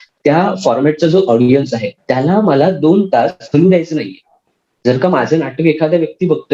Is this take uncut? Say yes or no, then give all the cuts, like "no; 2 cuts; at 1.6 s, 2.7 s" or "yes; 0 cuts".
yes; 0 cuts